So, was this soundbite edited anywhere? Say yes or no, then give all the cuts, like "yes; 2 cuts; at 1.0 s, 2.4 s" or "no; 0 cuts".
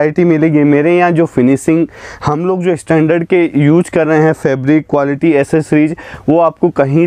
no; 0 cuts